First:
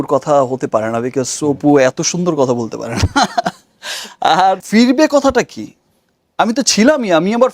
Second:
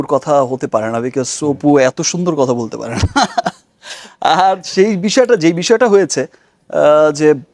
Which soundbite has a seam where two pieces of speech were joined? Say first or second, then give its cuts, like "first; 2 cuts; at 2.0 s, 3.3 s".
first; 1 cut; at 4.6 s